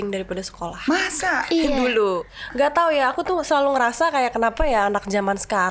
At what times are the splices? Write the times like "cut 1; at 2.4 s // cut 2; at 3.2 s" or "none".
cut 1; at 2.2 s